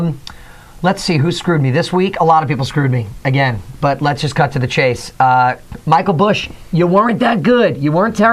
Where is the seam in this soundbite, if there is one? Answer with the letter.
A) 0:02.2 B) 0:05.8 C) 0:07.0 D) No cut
C